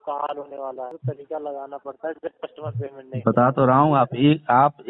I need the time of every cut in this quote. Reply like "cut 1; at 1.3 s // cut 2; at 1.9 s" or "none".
cut 1; at 1.0 s